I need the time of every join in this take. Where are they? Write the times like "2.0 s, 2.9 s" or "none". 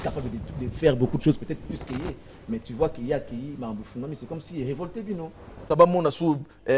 5.7 s